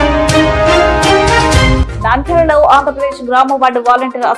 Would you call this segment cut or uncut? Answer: cut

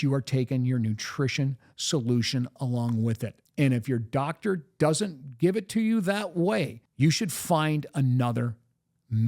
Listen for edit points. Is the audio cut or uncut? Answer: cut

